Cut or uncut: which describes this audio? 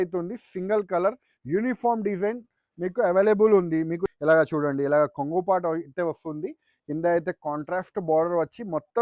cut